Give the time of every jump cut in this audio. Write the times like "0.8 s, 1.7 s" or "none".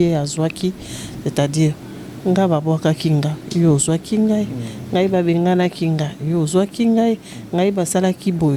none